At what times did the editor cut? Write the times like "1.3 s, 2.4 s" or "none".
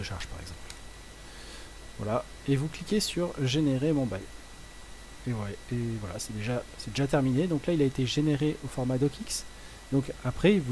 none